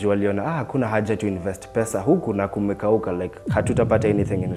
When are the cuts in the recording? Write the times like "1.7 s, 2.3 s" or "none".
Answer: none